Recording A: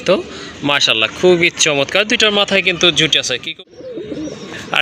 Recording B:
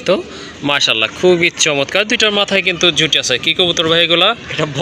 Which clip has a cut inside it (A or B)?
A